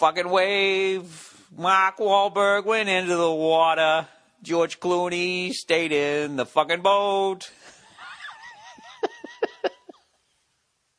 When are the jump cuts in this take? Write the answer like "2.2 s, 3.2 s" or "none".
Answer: 1.8 s